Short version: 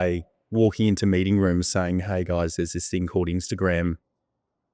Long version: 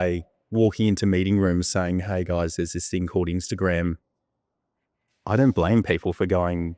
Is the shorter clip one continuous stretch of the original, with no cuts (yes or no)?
yes